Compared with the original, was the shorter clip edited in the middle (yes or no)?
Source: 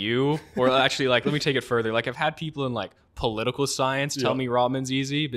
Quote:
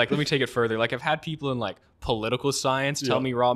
no